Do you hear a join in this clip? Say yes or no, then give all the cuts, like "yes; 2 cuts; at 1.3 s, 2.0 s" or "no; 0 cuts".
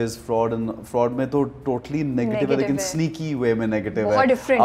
no; 0 cuts